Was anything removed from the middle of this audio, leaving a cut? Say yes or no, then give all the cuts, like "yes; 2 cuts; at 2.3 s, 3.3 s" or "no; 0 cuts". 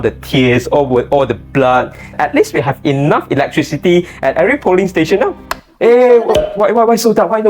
yes; 1 cut; at 2.1 s